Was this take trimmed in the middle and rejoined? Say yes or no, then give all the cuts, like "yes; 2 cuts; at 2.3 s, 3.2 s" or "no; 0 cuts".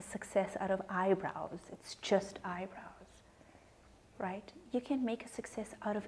no; 0 cuts